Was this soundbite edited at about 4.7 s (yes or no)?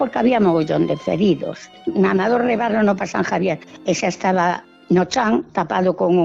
yes